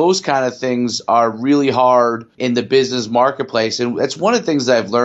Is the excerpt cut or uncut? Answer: cut